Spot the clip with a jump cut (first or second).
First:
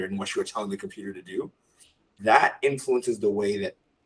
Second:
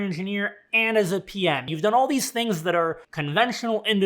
second